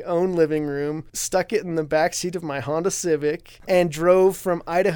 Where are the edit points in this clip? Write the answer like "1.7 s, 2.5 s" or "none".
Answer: 1.1 s, 3.5 s